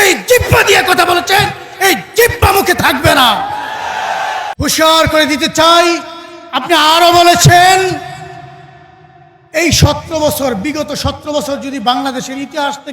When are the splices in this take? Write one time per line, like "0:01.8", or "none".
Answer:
0:04.5